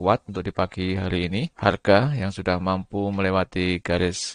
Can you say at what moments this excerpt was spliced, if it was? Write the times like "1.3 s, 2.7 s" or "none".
1.5 s